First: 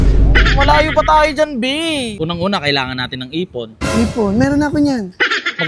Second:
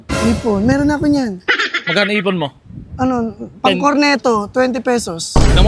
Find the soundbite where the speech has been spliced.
first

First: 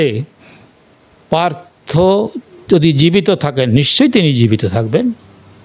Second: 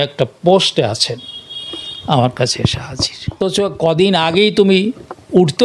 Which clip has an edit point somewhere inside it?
second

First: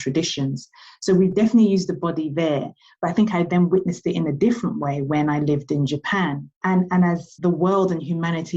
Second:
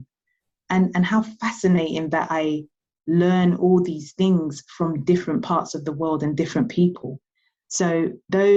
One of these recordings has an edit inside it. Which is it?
first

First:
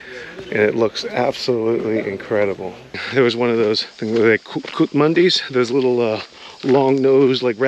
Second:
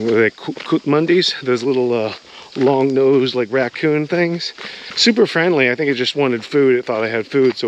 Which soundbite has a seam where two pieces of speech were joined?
first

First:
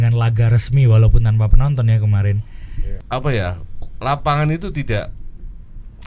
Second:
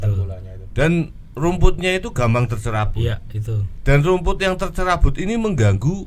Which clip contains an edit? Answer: first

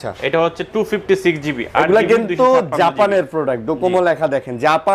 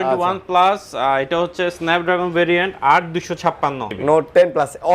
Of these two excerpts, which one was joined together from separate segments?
second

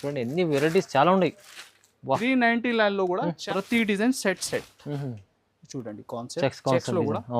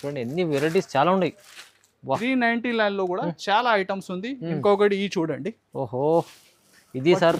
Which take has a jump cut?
first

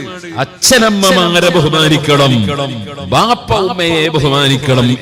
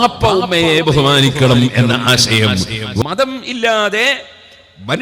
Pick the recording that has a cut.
second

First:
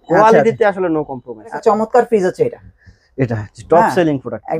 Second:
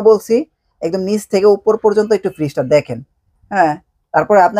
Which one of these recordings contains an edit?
first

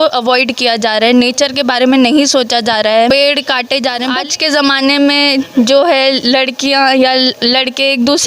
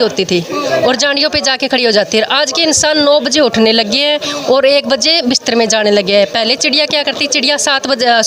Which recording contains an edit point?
first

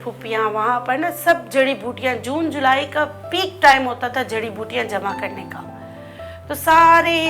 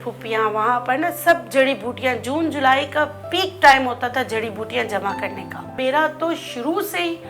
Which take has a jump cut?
second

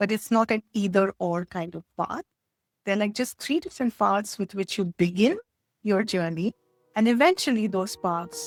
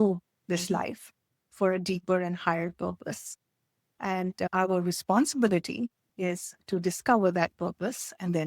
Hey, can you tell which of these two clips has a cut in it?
second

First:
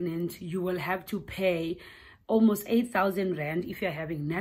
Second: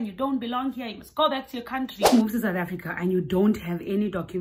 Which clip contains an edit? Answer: second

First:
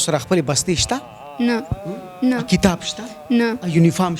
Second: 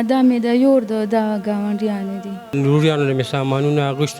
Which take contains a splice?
second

